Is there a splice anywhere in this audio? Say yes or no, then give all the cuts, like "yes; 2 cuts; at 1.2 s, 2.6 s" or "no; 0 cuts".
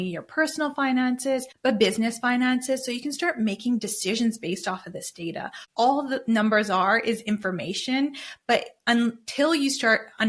yes; 2 cuts; at 1.5 s, 5.6 s